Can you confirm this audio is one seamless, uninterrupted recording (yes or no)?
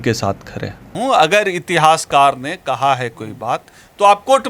no